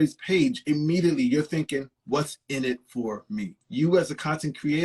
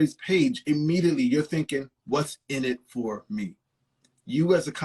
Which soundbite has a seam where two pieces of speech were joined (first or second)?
first